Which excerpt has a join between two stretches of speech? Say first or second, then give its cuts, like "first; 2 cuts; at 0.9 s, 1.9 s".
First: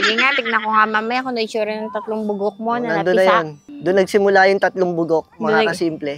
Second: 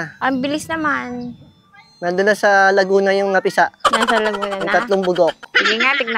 first; 1 cut; at 3.6 s